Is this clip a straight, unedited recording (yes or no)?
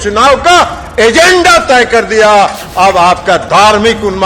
no